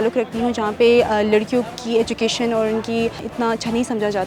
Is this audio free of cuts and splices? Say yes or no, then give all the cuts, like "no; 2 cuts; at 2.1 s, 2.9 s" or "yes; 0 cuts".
no; 1 cut; at 3.2 s